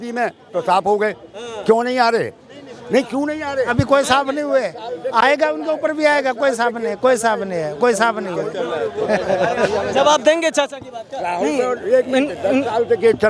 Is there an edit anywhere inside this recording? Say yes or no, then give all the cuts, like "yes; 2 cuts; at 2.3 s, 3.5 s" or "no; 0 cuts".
no; 0 cuts